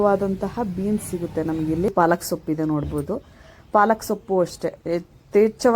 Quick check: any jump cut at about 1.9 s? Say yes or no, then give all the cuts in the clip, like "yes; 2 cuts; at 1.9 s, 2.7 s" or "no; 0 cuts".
yes; 1 cut; at 1.9 s